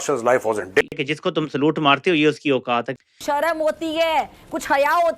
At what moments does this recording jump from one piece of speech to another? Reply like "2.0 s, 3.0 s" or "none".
0.8 s, 3.1 s